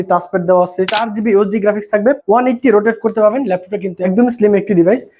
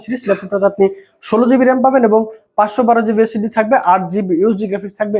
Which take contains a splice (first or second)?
first